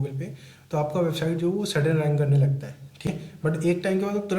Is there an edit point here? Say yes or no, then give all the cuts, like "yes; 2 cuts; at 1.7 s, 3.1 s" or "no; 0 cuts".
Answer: yes; 1 cut; at 3.0 s